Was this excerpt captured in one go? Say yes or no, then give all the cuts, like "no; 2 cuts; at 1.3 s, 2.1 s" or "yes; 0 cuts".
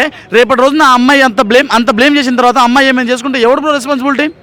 yes; 0 cuts